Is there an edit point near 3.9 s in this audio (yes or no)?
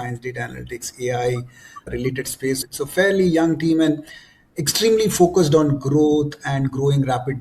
no